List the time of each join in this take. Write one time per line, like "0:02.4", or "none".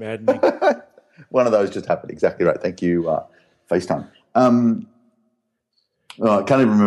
none